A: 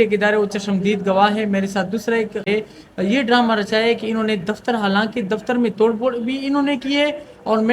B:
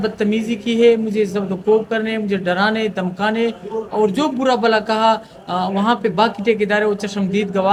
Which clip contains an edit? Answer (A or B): A